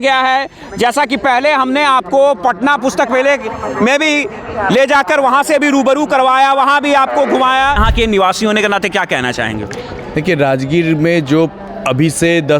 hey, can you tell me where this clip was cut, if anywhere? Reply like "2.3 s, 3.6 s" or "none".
7.8 s

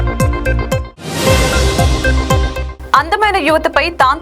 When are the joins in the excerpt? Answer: 0.9 s, 2.7 s

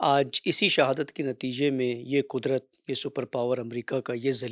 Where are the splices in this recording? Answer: none

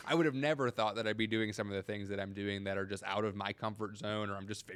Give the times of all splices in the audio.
none

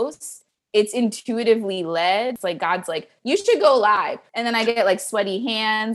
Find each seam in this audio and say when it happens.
2.4 s, 4.3 s

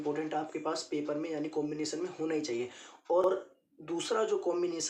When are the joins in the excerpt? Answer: none

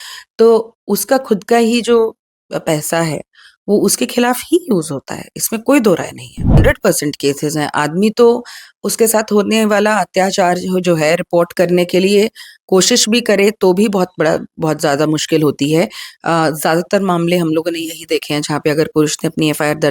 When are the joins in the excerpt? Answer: 6.6 s

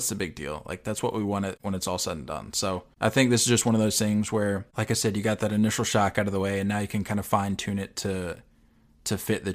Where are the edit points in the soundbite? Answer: 1.6 s, 2.9 s, 4.7 s

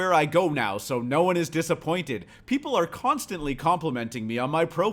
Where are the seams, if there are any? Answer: none

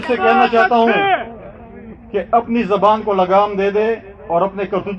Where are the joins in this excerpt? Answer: none

